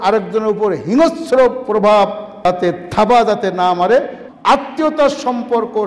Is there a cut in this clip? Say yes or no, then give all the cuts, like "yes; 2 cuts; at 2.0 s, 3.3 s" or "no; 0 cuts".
yes; 2 cuts; at 2.3 s, 4.2 s